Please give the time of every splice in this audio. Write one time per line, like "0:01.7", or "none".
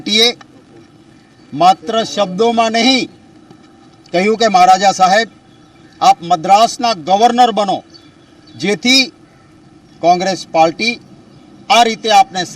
0:06.8